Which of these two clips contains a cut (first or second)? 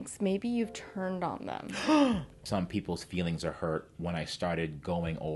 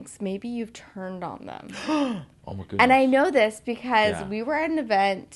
first